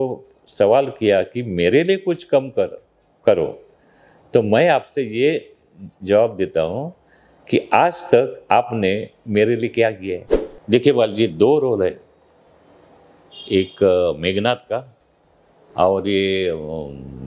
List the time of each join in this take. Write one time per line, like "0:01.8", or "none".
0:10.1